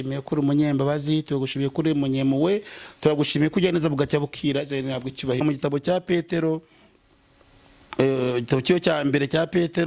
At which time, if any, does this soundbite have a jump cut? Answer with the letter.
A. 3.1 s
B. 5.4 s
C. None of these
B